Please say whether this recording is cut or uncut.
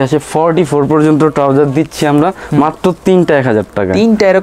uncut